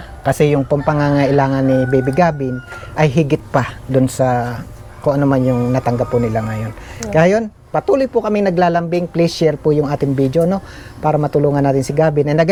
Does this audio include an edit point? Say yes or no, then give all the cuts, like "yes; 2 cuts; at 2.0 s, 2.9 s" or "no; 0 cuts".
no; 0 cuts